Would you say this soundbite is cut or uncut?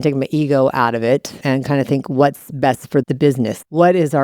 cut